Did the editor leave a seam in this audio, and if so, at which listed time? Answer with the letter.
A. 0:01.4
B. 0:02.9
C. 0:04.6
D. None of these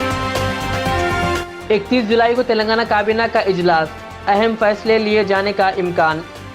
A